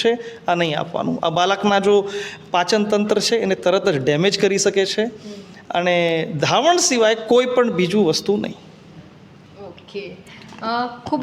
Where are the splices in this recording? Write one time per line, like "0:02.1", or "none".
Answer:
none